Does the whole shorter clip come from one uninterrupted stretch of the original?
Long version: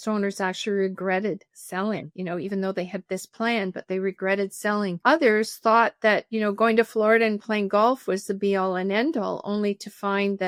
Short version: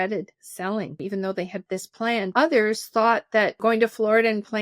no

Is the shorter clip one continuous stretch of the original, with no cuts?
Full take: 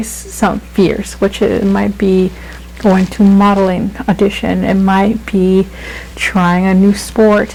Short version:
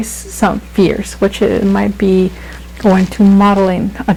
yes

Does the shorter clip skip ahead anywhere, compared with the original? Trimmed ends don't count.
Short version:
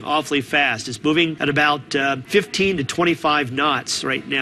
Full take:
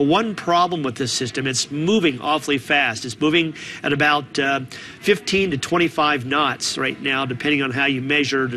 yes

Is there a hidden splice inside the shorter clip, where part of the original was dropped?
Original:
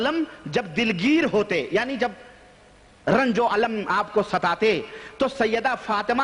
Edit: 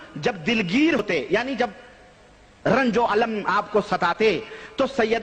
yes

